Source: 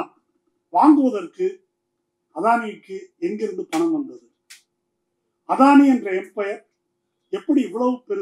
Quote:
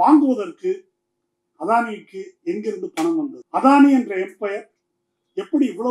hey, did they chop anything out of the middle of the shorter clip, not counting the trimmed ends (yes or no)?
yes